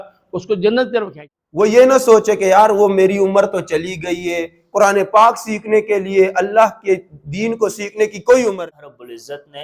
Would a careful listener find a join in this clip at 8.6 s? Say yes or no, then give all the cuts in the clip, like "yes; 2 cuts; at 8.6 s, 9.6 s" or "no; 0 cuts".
yes; 2 cuts; at 1.2 s, 8.6 s